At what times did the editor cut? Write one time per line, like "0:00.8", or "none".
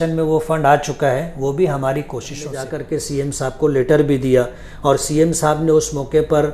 0:02.6

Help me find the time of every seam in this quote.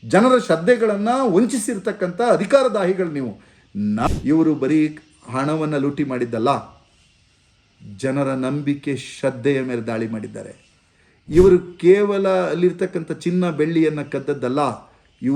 0:04.1

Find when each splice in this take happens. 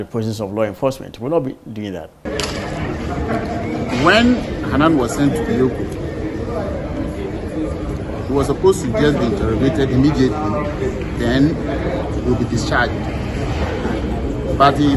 0:02.3

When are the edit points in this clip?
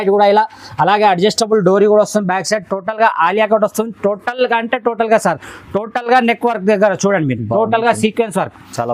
none

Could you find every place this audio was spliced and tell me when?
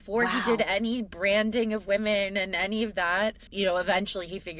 0:03.4

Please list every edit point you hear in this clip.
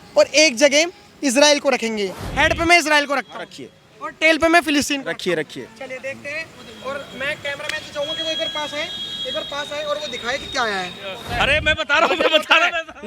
0:02.2
0:11.3

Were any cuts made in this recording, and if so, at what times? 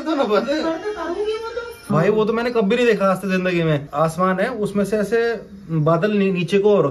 0:01.9
0:03.9

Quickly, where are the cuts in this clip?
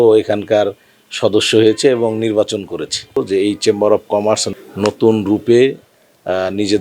0:03.2

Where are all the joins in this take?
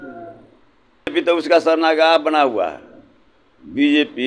0:01.1

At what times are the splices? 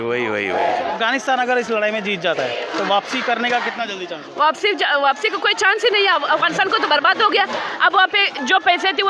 0:00.9

